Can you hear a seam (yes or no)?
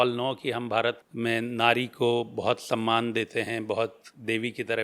yes